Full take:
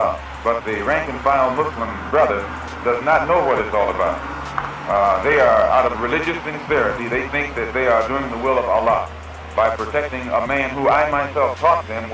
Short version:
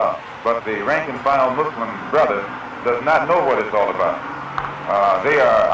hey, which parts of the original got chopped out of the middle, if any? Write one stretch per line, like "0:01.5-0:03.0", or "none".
none